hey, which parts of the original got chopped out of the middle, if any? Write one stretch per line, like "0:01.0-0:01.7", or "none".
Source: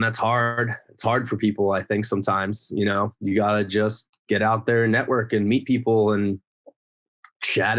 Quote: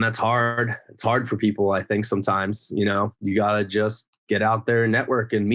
none